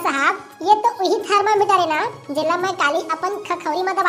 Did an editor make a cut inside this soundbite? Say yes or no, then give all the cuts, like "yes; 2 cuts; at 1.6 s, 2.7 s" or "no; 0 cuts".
no; 0 cuts